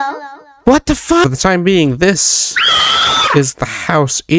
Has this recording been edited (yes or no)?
yes